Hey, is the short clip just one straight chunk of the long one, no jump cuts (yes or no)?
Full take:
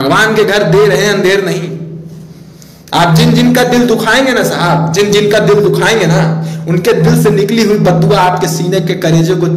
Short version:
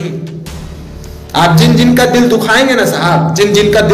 yes